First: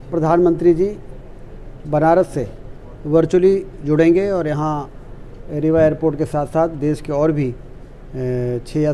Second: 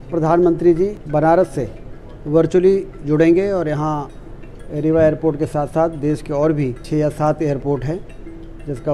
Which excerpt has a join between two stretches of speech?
second; 2 cuts; at 1.0 s, 6.8 s

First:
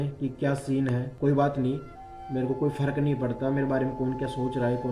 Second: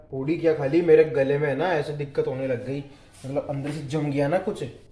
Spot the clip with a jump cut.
first; 1 cut; at 1.1 s

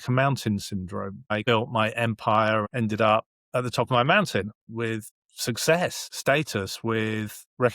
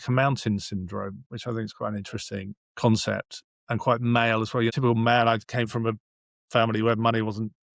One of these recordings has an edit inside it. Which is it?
first; 4 cuts; at 1.4 s, 2.7 s, 4.7 s, 6.1 s

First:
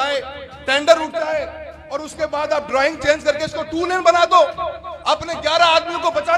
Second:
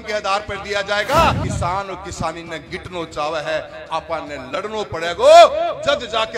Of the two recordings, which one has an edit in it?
second; 1 cut; at 1.4 s

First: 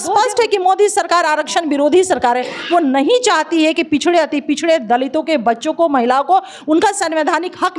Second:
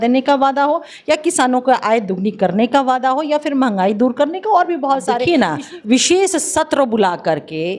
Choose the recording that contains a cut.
second; 1 cut; at 5.2 s

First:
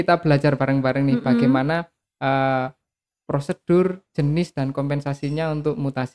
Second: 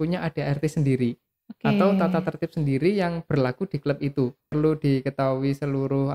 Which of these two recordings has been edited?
second; 1 cut; at 4.5 s

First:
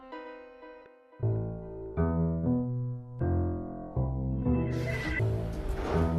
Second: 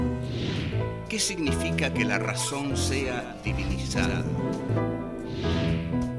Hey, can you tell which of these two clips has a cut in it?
first; 1 cut; at 1.0 s

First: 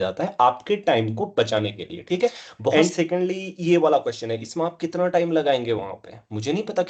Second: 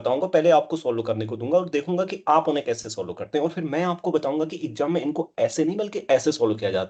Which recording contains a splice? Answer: first; 1 cut; at 2.7 s

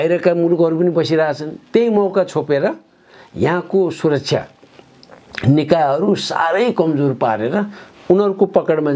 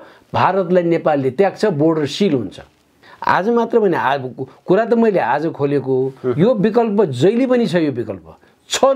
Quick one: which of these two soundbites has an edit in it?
second; 1 cut; at 3.0 s

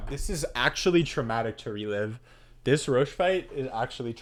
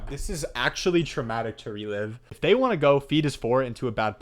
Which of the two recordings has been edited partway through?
second; 1 cut; at 2.2 s

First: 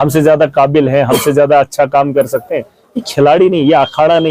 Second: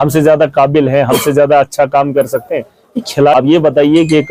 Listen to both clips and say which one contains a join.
second; 1 cut; at 3.3 s

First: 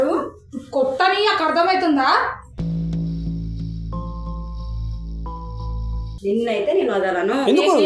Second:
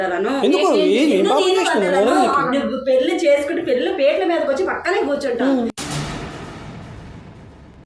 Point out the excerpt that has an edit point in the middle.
first; 1 cut; at 6.1 s

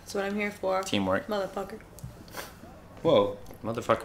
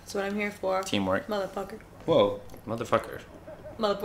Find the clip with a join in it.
second; 1 cut; at 1.8 s

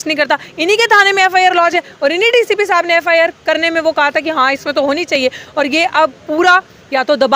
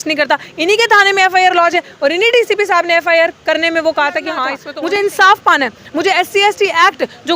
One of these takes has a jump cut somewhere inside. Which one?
second; 1 cut; at 4.6 s

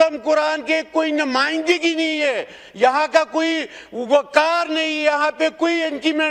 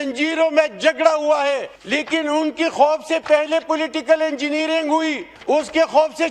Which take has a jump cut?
second; 2 cuts; at 1.8 s, 5.3 s

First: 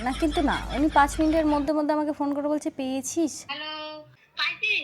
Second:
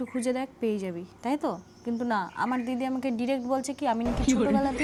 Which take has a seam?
first; 1 cut; at 3.8 s

